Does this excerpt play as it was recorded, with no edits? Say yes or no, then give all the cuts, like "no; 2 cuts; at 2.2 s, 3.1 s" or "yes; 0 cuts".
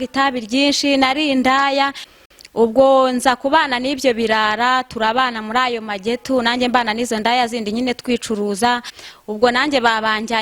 no; 2 cuts; at 2.0 s, 8.9 s